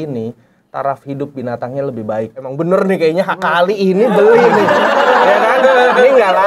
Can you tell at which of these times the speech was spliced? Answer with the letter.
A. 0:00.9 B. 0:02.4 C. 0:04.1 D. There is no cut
B